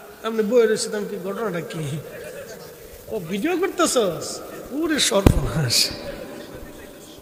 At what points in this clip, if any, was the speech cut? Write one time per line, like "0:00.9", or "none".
none